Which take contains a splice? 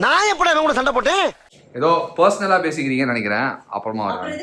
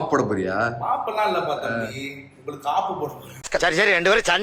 first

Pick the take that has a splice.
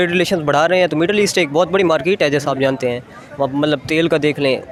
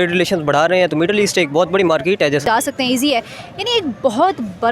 second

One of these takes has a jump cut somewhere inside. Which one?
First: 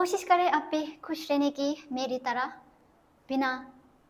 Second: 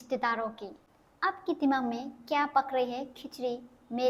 second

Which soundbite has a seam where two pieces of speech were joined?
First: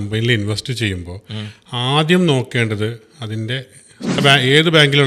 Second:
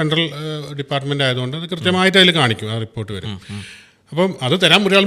first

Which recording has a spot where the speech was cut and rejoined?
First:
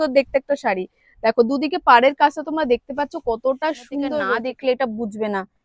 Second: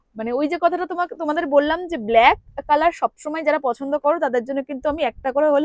first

